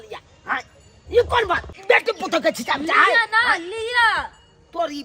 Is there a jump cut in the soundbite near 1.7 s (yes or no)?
yes